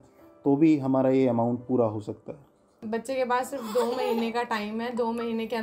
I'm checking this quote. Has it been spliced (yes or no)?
yes